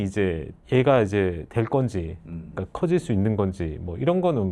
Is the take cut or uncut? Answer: uncut